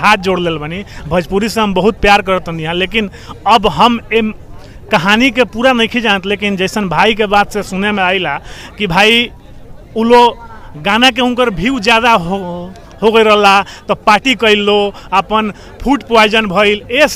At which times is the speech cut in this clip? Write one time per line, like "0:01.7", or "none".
none